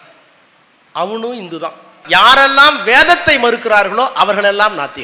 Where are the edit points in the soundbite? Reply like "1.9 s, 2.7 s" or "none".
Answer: 2.0 s

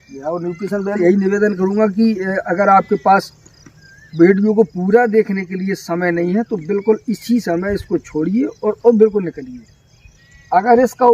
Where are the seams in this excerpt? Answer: 1.0 s

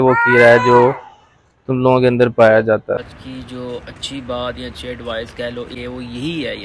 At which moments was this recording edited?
3.0 s, 5.7 s

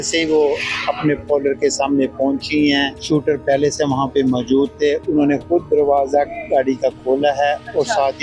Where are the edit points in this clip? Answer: 3.0 s

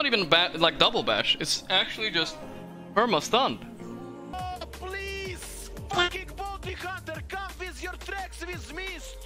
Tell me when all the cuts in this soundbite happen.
4.3 s

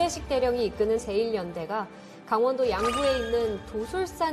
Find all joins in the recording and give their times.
1.0 s

